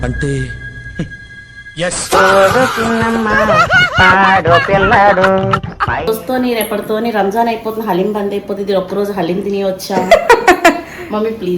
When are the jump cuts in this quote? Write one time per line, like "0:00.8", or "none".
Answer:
0:06.0